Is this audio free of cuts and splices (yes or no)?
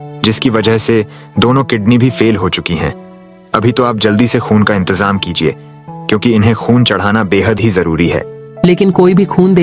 yes